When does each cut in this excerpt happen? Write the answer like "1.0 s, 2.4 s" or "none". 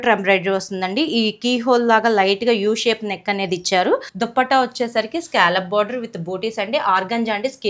4.1 s